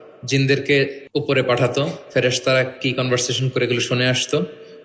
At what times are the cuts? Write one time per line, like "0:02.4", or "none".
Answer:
0:01.0